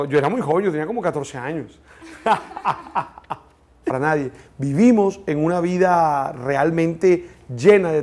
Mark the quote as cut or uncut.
uncut